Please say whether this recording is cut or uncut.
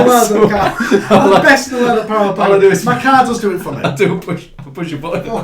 uncut